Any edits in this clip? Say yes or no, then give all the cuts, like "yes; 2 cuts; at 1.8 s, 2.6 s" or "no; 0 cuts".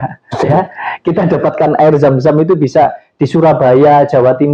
no; 0 cuts